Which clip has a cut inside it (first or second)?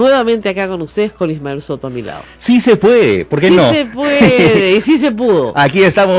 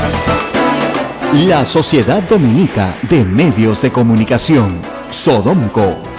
second